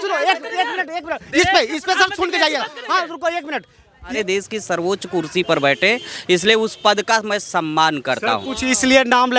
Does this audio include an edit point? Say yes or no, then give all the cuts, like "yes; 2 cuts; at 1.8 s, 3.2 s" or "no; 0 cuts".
yes; 1 cut; at 4.1 s